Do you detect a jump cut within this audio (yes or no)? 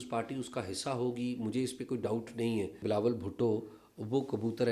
yes